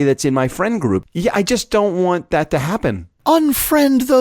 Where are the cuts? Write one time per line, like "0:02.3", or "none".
0:01.0
0:03.1